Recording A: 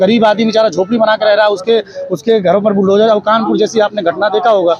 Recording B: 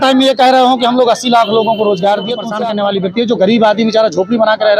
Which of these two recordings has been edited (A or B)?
B